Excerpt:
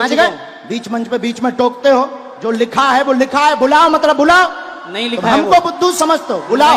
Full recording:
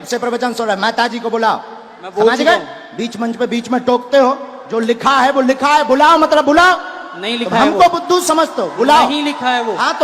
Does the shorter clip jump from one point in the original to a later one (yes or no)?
no